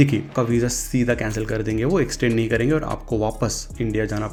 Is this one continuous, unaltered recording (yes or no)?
yes